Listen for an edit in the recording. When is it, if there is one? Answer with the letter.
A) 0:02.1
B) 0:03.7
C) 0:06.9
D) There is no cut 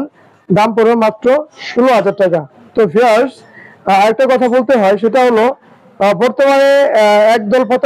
D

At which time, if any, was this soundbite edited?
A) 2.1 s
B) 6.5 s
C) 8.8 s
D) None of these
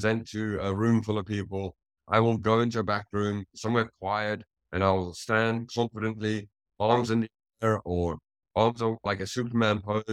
D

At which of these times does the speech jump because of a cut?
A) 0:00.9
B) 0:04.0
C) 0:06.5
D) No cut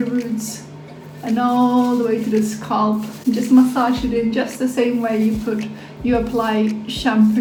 D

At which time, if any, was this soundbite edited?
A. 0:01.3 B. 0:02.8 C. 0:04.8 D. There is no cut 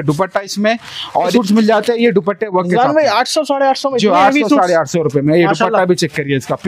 A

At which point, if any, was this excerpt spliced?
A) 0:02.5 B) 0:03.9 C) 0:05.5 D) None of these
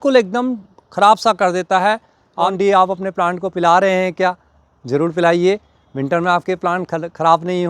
A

